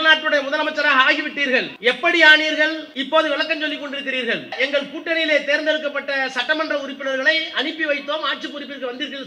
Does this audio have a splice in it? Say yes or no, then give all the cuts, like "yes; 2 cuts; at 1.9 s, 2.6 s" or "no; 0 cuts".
yes; 3 cuts; at 1.7 s, 2.9 s, 4.5 s